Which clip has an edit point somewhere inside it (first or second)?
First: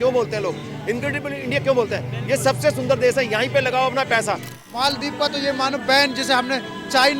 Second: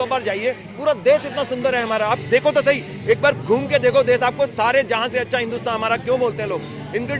first